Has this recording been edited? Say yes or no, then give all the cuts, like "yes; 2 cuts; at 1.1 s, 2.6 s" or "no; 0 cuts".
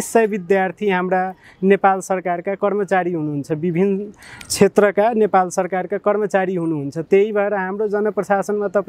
no; 0 cuts